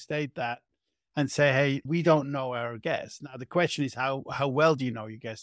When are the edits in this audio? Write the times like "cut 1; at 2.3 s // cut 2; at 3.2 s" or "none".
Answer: cut 1; at 1.9 s